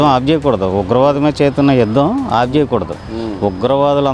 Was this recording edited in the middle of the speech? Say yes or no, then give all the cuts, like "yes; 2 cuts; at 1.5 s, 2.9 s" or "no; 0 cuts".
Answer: no; 0 cuts